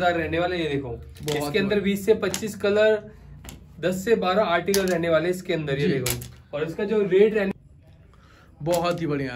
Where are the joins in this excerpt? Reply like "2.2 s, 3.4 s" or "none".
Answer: 7.5 s